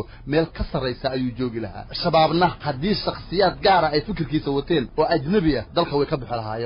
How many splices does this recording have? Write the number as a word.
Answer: four